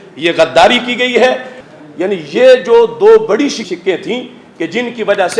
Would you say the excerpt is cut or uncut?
cut